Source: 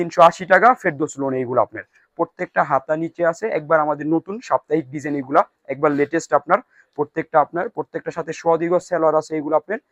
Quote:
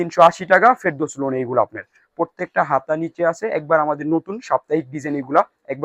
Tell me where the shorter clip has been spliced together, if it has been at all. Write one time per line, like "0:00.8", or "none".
none